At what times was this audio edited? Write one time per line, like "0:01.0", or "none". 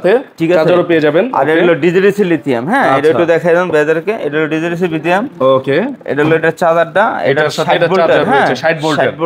none